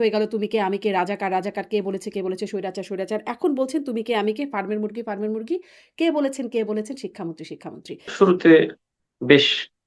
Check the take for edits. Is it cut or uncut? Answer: cut